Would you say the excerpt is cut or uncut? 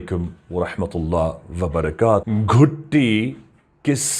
cut